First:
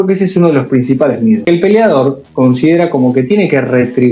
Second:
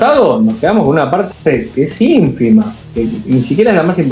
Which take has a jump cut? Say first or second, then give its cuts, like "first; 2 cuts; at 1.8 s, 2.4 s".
first; 1 cut; at 1.4 s